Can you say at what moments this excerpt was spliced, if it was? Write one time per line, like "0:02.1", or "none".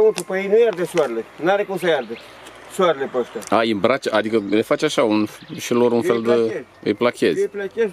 none